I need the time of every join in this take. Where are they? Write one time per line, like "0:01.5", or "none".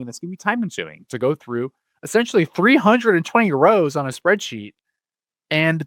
none